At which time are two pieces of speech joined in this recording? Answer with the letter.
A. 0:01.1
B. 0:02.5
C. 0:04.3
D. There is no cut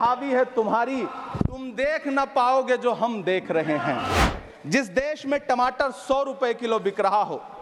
C